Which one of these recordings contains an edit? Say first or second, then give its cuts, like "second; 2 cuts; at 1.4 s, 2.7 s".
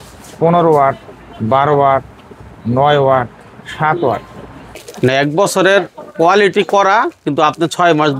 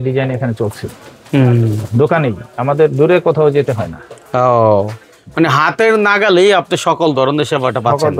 first; 1 cut; at 4.7 s